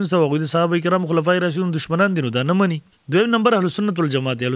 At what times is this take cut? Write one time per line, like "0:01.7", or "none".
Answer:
0:02.9

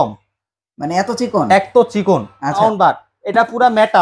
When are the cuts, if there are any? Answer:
0:02.6

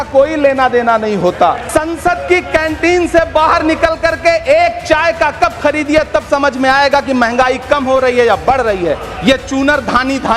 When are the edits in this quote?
0:01.6
0:09.1

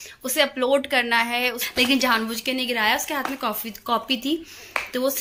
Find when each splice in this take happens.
0:01.6

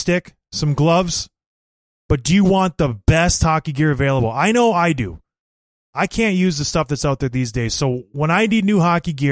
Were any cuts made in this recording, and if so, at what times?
none

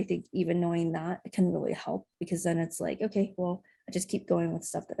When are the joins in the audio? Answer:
none

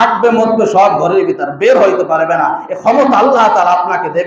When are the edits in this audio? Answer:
none

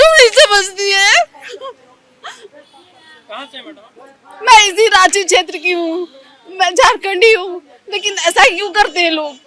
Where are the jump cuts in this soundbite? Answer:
none

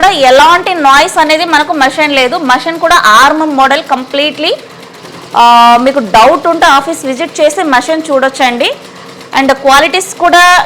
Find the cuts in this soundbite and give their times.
none

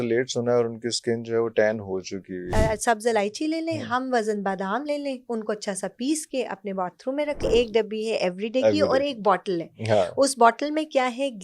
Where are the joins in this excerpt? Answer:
0:02.5
0:07.4

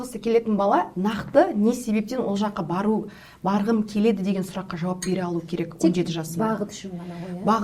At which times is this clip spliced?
none

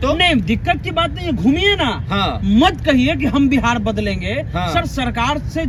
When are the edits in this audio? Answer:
none

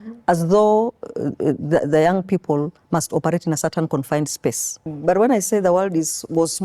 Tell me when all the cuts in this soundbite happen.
0:04.9

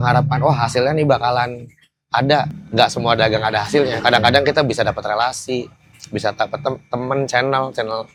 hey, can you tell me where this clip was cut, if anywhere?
none

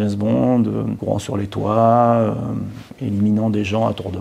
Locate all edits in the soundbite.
0:00.9

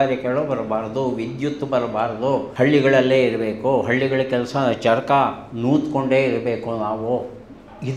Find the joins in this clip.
0:02.5

